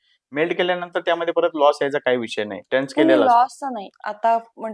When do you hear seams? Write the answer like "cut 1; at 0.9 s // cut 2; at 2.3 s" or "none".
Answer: none